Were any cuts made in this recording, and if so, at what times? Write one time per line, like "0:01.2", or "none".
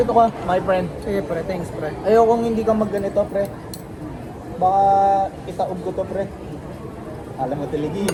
none